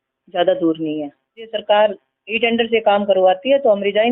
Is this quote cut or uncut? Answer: cut